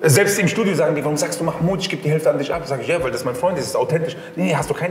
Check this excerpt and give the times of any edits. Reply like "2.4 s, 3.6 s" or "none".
none